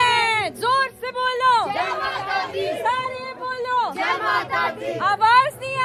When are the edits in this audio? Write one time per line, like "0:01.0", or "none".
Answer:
none